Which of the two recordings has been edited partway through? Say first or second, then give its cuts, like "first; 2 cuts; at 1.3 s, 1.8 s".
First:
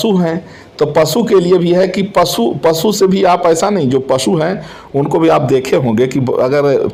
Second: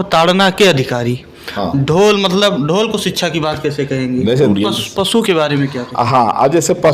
second; 1 cut; at 4.5 s